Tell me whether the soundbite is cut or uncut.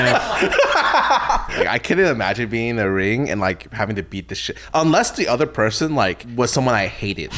cut